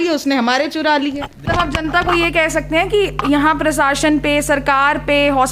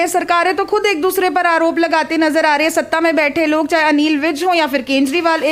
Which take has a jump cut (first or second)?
first